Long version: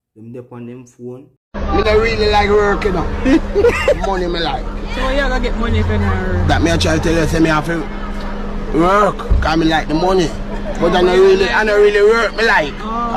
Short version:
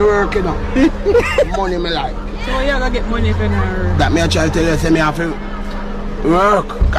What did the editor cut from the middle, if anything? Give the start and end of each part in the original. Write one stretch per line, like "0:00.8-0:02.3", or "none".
none